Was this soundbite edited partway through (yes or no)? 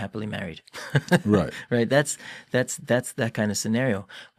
no